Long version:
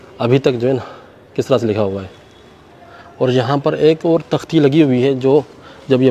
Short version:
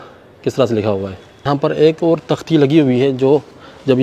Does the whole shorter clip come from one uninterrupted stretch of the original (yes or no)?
no